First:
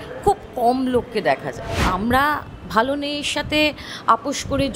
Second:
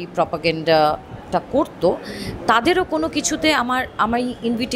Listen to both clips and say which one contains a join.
first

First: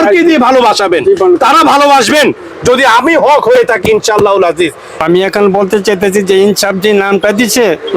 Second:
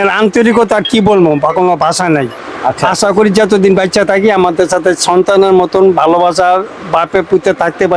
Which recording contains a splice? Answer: first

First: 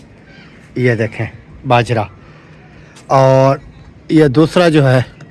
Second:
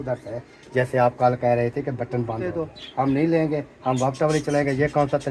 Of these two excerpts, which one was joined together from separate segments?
second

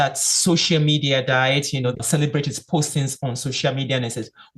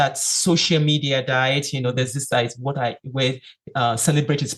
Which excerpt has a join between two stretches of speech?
first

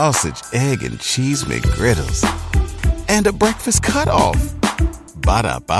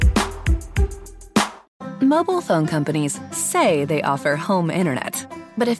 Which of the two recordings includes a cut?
second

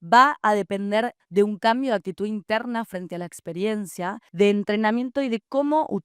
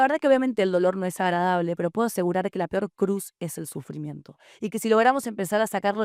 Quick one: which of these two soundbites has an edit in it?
first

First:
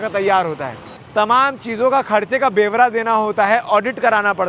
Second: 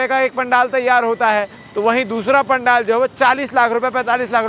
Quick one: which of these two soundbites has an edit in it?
first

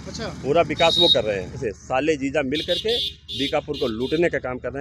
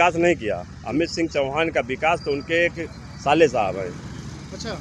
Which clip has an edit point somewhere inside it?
first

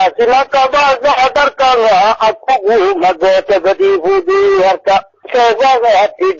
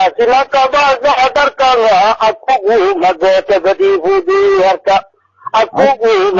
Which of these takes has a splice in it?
second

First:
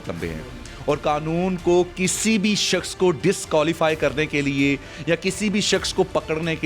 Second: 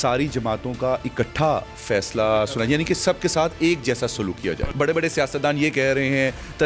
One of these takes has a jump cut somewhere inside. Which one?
second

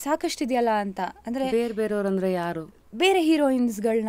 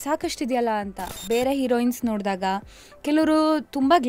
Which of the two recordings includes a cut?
second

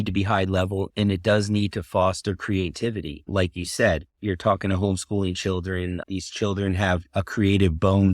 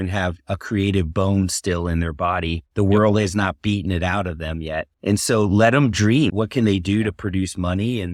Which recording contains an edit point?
first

